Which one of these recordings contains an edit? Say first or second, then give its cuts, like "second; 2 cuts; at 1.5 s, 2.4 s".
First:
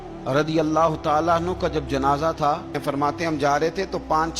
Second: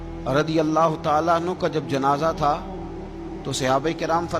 first; 1 cut; at 2.8 s